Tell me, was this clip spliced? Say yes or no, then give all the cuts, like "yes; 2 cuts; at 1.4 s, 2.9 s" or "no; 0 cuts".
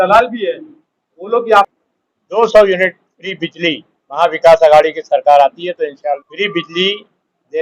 yes; 2 cuts; at 1.7 s, 6.2 s